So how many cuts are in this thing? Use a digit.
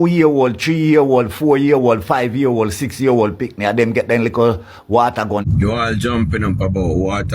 1